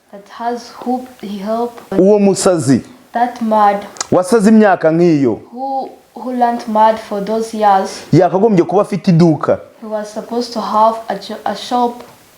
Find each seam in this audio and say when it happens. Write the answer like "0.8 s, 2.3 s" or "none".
1.9 s